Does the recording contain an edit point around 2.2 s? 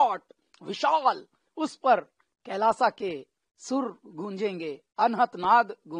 no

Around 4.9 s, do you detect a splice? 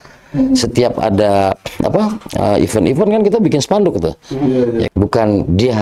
yes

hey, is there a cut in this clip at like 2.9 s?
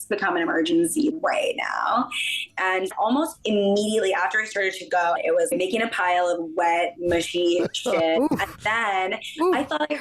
yes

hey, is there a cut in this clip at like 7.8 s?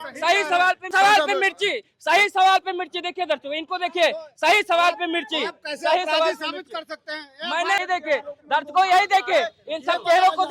yes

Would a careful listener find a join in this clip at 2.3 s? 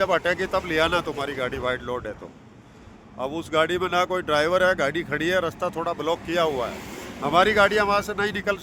no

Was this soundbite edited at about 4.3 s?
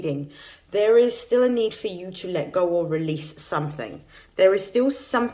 no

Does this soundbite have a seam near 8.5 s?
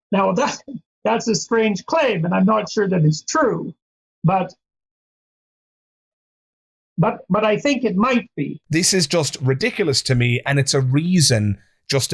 yes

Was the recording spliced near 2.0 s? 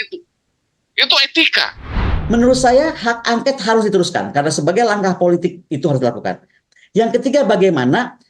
yes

